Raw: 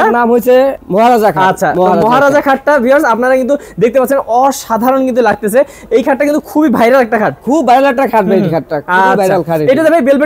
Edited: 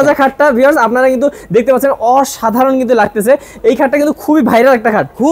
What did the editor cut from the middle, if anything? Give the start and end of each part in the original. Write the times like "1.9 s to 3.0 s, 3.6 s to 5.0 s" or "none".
none